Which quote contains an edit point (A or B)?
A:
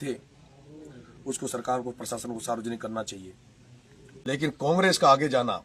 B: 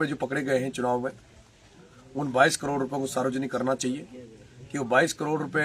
A